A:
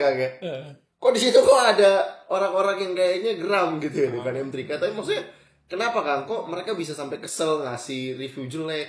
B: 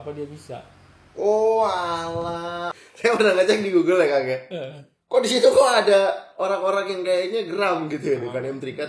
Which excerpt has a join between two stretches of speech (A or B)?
B